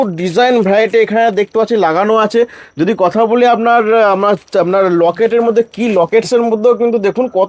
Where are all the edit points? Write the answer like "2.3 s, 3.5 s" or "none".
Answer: none